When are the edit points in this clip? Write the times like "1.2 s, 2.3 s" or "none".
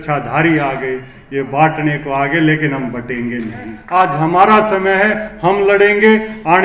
3.8 s

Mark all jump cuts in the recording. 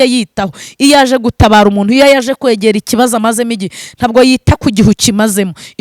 none

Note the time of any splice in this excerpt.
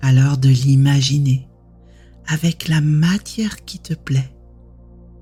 none

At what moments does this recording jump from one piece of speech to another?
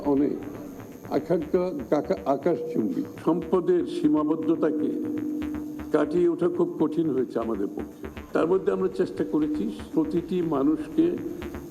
9.9 s

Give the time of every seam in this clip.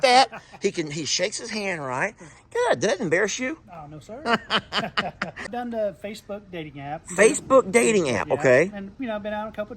5.4 s

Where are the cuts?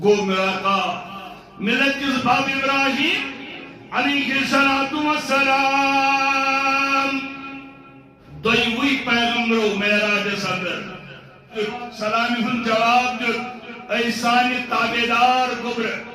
11.5 s

